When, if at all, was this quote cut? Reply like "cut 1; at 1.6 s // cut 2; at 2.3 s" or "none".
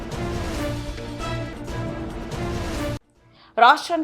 none